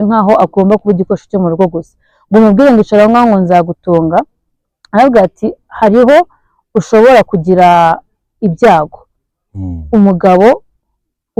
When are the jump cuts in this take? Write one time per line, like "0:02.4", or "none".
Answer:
none